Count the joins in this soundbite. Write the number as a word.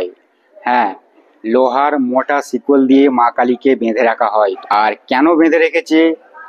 one